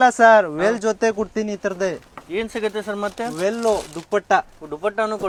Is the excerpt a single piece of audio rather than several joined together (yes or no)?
yes